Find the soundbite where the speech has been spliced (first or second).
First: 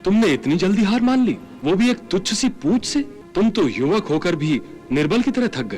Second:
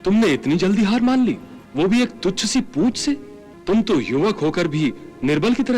first